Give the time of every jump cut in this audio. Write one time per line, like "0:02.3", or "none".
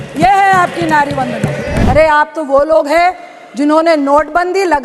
0:01.7